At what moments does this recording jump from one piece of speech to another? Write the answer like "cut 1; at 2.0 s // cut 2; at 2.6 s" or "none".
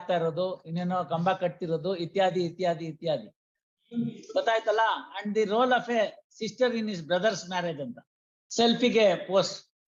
none